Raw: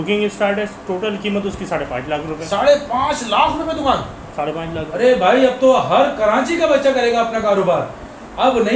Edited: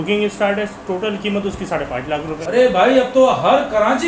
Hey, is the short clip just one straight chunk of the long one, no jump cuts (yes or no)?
no